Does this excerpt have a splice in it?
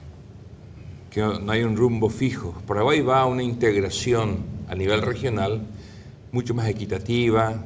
yes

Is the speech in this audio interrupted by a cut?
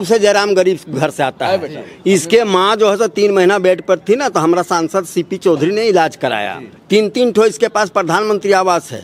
no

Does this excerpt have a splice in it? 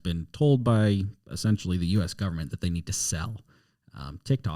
no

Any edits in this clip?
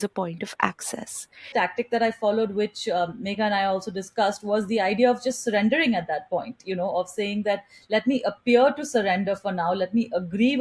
yes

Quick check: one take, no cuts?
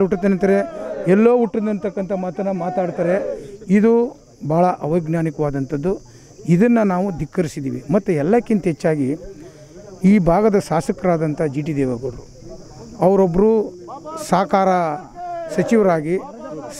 yes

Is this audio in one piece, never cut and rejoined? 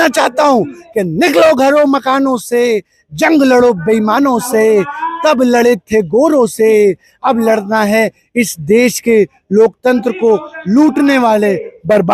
yes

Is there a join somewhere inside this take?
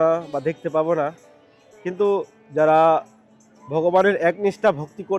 no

